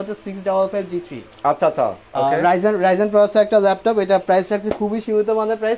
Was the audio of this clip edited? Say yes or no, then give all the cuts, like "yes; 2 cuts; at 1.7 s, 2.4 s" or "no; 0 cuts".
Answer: no; 0 cuts